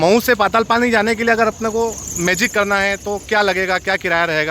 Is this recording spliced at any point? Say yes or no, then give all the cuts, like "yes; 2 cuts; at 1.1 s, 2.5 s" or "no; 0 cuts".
no; 0 cuts